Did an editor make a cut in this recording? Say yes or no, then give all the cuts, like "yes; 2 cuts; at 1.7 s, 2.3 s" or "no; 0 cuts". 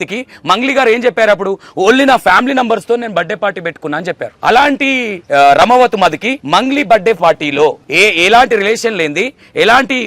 yes; 4 cuts; at 4.3 s, 5.1 s, 6.3 s, 7.8 s